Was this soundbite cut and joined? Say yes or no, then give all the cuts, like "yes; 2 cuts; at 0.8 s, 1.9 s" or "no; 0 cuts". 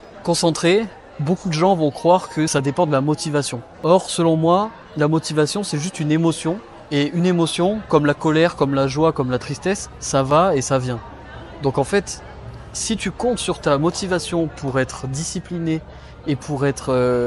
yes; 3 cuts; at 2.5 s, 3.6 s, 6.7 s